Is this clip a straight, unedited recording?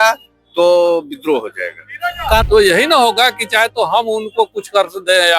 no; 1 cut; at 2.4 s

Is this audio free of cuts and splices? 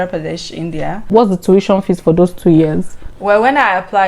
no; 1 cut; at 1.1 s

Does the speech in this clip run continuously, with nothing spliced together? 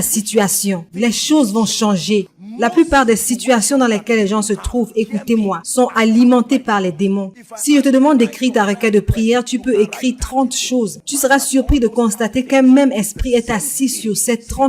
no; 1 cut; at 11.0 s

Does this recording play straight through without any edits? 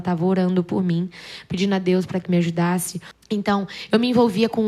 no; 1 cut; at 3.1 s

